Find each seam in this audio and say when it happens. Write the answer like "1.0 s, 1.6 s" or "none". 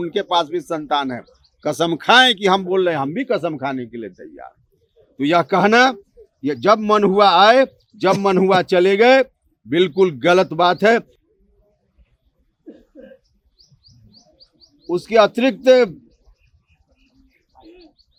none